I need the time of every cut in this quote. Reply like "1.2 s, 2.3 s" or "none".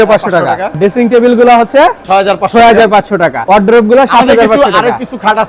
0.8 s, 3.4 s

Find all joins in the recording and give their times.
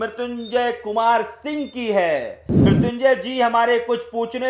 2.4 s

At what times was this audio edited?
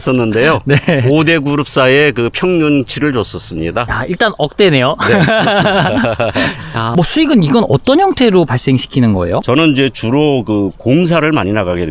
3.9 s, 6.9 s, 9.4 s

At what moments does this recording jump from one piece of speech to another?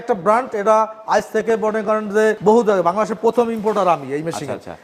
2.4 s

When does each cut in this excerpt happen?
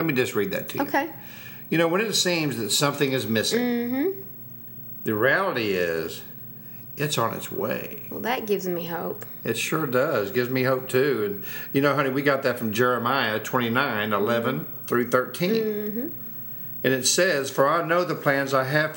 none

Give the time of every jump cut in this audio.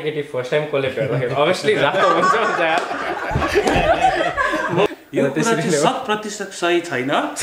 4.9 s

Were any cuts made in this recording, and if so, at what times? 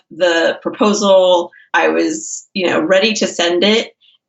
1.6 s

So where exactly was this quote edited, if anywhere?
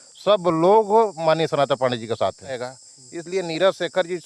2.7 s

